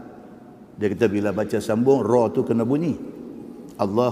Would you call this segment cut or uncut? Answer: uncut